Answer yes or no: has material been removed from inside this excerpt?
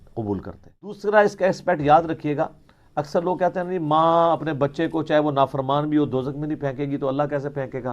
yes